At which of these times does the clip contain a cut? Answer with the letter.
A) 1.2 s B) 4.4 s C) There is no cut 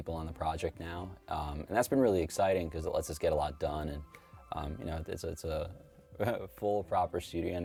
C